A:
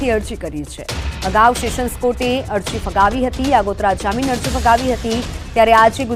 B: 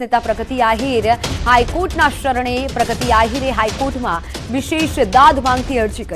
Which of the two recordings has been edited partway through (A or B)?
B